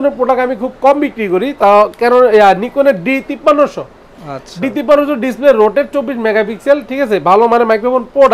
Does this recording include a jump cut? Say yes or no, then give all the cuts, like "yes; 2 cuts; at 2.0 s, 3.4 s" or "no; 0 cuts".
no; 0 cuts